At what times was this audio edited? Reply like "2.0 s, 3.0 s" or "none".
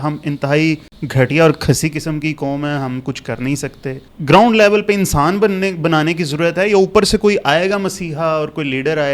0.9 s, 4.1 s